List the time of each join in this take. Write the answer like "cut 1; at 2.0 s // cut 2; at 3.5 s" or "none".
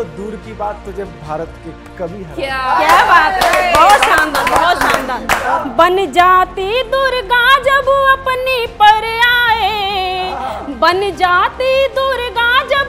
cut 1; at 5.6 s